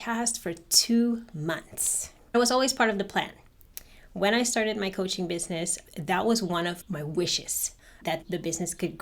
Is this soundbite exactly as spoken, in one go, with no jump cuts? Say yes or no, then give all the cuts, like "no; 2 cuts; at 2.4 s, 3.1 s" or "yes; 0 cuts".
no; 1 cut; at 2.3 s